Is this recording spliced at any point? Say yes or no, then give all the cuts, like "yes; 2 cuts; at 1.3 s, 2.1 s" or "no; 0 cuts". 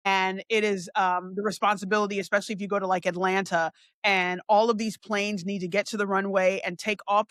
no; 0 cuts